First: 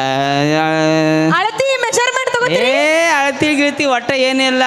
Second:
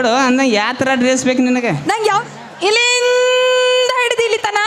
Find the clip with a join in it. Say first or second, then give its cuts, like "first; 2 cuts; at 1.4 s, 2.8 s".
second; 1 cut; at 2.2 s